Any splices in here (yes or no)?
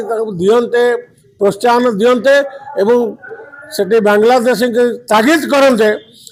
no